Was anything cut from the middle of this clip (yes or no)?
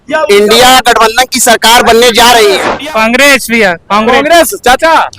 yes